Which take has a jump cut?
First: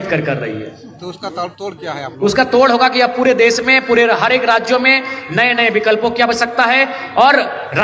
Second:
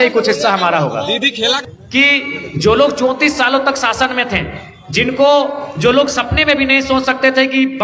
second; 1 cut; at 1.7 s

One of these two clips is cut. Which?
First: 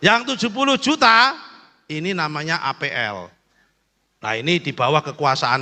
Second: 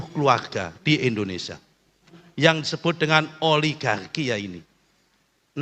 second; 1 cut; at 2.2 s

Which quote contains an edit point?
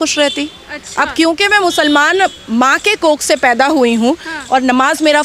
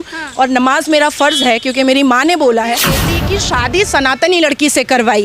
second; 1 cut; at 3.1 s

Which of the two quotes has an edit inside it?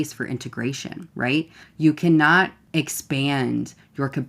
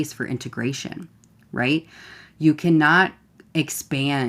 first; 2 cuts; at 1.4 s, 2.6 s

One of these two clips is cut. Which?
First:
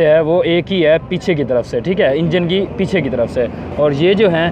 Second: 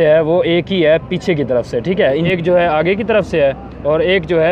second; 1 cut; at 2.3 s

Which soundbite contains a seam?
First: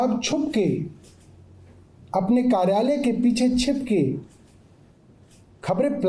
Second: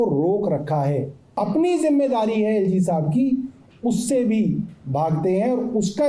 second; 1 cut; at 1.3 s

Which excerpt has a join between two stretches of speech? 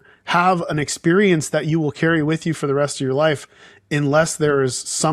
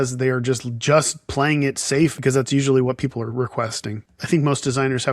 second; 2 cuts; at 2.2 s, 4.0 s

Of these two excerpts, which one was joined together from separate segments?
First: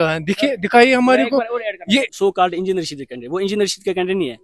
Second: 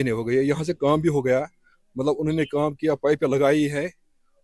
first; 1 cut; at 2.1 s

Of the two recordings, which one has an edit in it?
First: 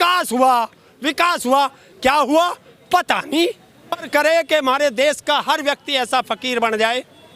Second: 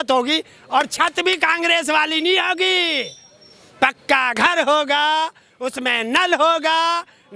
first; 1 cut; at 4.1 s

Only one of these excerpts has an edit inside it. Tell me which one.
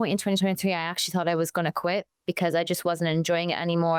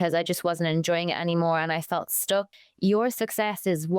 second; 1 cut; at 2.6 s

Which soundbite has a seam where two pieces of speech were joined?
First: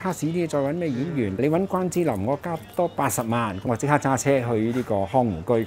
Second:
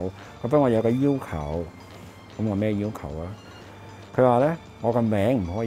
first; 2 cuts; at 1.4 s, 3.7 s

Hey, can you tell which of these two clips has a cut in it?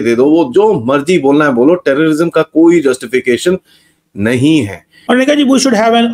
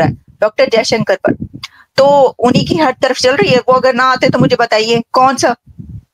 first; 1 cut; at 4.9 s

